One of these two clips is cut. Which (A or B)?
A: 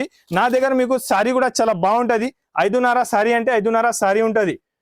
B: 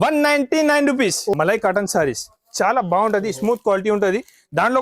B